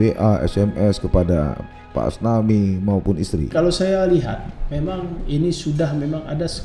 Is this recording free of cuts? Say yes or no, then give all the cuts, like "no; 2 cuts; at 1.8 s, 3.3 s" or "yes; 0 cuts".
no; 1 cut; at 3.5 s